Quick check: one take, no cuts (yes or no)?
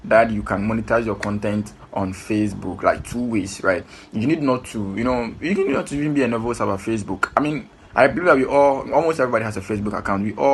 yes